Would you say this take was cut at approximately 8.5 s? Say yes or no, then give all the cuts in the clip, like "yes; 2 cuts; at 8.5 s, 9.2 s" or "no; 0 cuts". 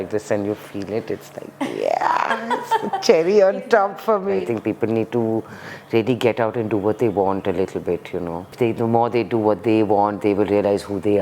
yes; 2 cuts; at 4.4 s, 8.5 s